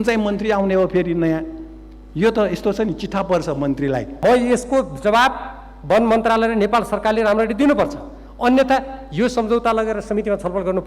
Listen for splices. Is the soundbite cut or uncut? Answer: cut